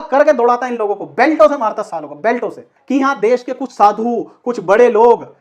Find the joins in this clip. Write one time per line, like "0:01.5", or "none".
0:02.7